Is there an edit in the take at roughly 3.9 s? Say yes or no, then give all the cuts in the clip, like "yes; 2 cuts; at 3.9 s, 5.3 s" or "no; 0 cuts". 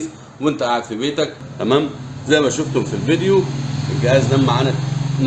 no; 1 cut; at 1.4 s